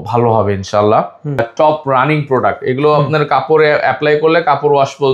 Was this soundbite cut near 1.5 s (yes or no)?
yes